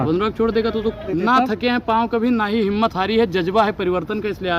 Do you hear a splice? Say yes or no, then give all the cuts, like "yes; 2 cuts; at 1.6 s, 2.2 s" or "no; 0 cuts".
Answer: yes; 1 cut; at 1.1 s